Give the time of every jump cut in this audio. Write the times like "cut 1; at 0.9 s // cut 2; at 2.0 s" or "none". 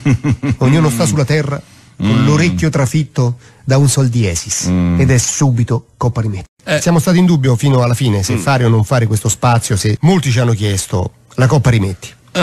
cut 1; at 6.5 s // cut 2; at 10.0 s